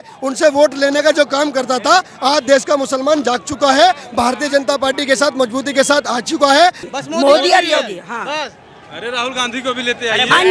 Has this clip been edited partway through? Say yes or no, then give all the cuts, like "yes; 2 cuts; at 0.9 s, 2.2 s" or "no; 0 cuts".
yes; 1 cut; at 6.8 s